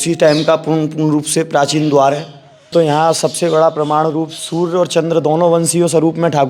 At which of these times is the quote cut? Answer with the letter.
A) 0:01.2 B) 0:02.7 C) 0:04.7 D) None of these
B